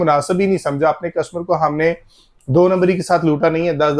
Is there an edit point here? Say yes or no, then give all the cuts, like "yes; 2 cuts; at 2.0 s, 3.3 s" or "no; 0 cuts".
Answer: no; 0 cuts